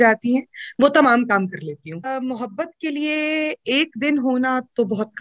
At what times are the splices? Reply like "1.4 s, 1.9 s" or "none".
2.1 s

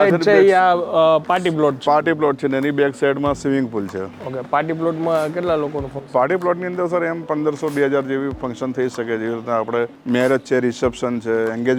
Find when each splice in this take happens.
none

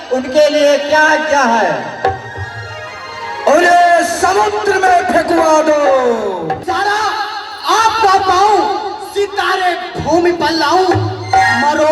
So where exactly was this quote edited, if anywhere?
6.5 s

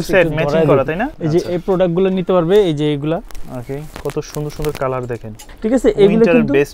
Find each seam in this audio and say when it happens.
1.1 s, 3.9 s, 5.4 s

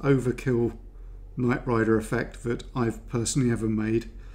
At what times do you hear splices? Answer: none

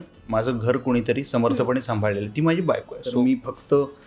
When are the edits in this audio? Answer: 3.2 s

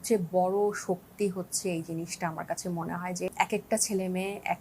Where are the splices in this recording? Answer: 3.3 s

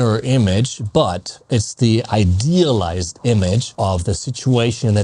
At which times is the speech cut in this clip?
3.7 s

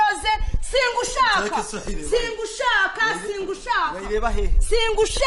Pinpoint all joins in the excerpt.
none

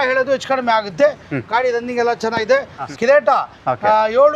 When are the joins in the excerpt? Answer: 2.8 s

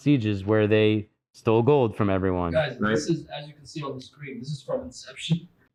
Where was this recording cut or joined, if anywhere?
none

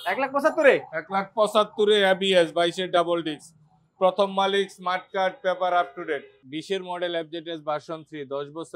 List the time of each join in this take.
6.4 s

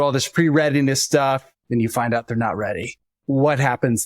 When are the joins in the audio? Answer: 1.5 s, 3.1 s

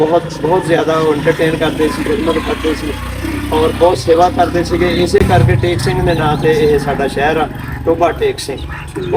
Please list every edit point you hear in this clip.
none

